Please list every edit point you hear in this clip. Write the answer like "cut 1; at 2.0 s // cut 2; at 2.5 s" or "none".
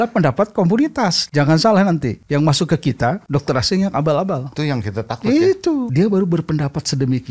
cut 1; at 1.2 s // cut 2; at 2.2 s // cut 3; at 3.2 s // cut 4; at 4.5 s // cut 5; at 5.9 s